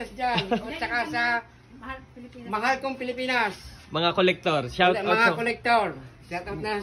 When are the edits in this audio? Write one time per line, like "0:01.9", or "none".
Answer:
none